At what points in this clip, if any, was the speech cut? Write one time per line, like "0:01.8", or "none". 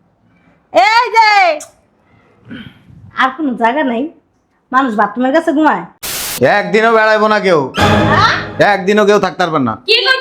0:06.2